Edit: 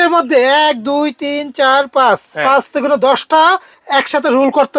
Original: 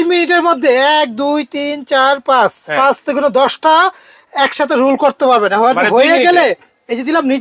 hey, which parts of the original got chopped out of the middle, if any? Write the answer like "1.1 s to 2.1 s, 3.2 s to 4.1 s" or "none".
4.1 s to 4.2 s